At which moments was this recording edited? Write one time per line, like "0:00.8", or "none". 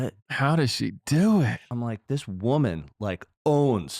0:01.6